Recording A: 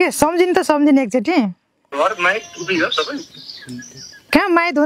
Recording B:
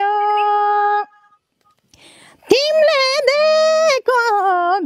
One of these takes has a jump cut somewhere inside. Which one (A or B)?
A